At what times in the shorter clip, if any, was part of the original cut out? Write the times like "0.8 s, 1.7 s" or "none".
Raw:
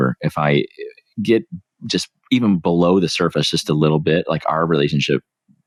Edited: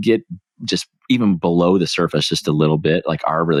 none